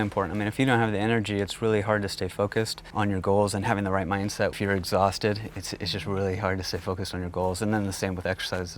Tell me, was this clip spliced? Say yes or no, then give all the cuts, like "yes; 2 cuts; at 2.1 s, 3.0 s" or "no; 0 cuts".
yes; 2 cuts; at 2.8 s, 4.6 s